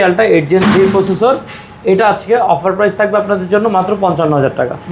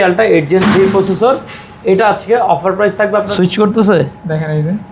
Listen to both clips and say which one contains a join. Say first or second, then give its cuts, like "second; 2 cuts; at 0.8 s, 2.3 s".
second; 1 cut; at 3.3 s